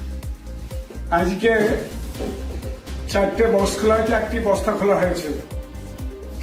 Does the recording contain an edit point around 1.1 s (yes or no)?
yes